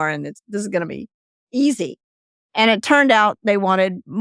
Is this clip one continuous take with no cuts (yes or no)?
yes